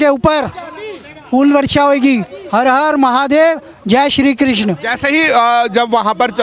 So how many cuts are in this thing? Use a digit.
0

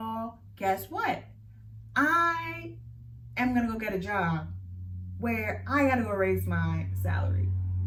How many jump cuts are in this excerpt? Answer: 0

